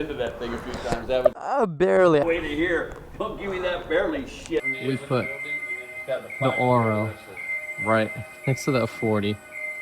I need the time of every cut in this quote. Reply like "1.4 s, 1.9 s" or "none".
2.2 s, 4.6 s